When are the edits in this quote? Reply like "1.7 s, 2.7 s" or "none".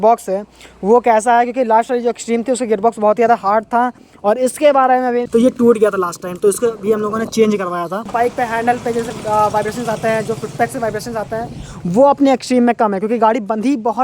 5.3 s, 8.1 s